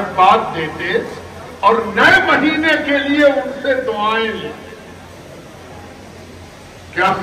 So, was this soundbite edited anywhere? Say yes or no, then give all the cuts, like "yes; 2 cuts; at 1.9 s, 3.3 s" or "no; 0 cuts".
no; 0 cuts